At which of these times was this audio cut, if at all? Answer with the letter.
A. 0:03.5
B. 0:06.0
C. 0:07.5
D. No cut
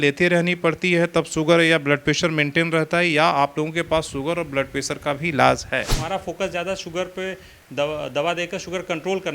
B